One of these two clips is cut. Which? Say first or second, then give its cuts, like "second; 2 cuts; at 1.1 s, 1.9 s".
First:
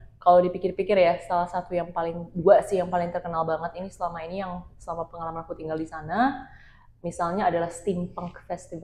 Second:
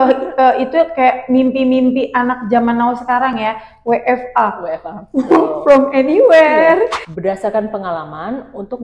second; 1 cut; at 7.0 s